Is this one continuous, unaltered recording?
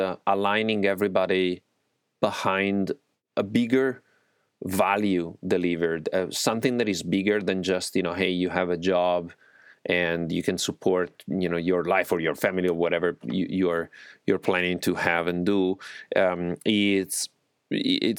no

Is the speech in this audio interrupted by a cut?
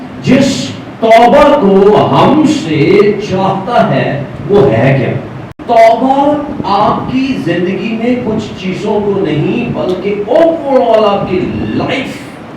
yes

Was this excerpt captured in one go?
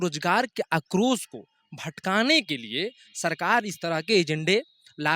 yes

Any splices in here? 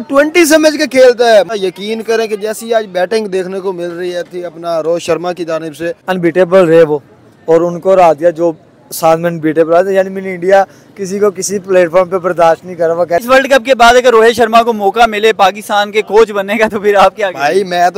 yes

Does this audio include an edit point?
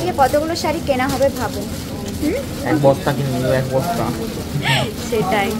no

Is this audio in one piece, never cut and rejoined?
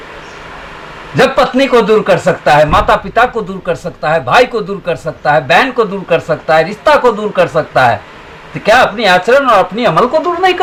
yes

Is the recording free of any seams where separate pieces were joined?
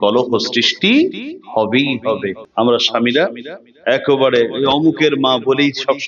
no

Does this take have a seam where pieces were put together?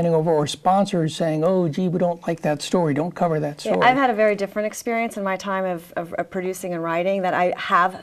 no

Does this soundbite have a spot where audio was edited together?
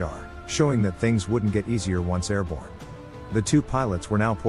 no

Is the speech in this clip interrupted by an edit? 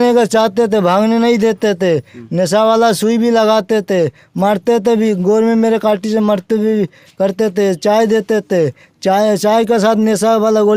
no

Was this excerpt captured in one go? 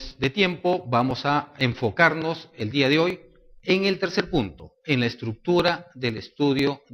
yes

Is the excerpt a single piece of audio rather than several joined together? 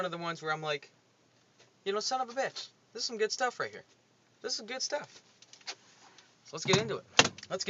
no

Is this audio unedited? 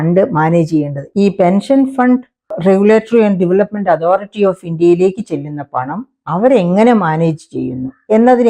no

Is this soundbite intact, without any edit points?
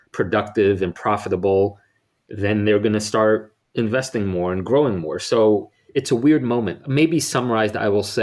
no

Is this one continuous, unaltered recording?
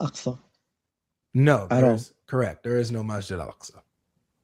yes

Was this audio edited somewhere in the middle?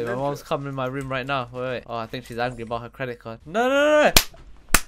yes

